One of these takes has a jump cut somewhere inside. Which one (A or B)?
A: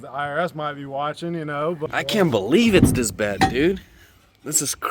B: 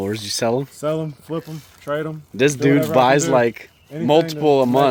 A